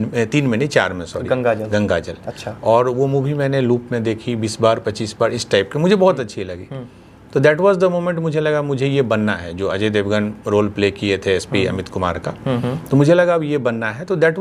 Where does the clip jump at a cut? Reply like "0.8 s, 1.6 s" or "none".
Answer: none